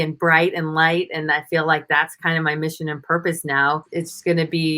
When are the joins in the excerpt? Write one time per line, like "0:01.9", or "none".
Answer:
0:03.9